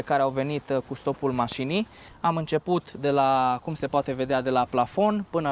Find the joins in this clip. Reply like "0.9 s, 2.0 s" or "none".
2.0 s